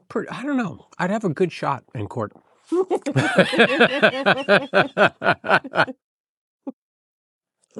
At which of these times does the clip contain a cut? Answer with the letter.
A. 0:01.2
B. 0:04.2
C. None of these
C